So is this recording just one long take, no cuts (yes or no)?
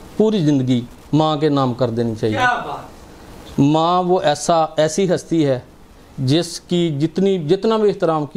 yes